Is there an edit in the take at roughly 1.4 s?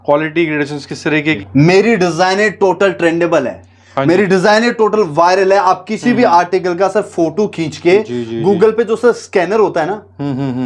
yes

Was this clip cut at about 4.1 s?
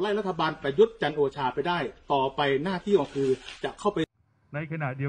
yes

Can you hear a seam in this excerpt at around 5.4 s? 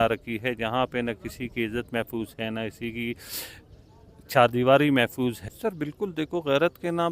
yes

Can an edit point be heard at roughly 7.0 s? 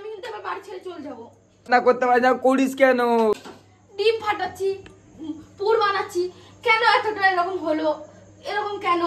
no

